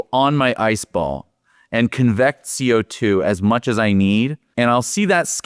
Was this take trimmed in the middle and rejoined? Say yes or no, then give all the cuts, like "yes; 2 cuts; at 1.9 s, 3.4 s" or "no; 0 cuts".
yes; 1 cut; at 4.4 s